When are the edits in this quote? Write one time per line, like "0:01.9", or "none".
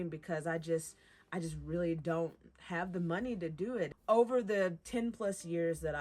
0:04.0
0:04.8